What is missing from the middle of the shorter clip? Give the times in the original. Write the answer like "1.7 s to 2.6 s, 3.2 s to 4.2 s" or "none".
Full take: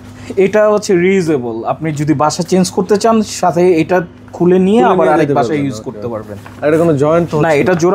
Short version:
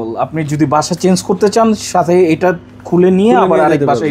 none